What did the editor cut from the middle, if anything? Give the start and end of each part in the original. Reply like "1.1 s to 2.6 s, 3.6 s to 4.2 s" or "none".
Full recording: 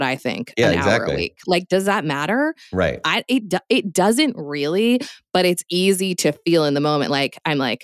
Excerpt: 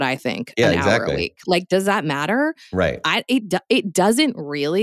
none